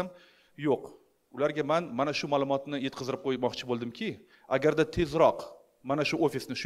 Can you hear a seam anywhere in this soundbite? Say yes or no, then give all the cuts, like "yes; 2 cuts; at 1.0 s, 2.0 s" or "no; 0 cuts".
no; 0 cuts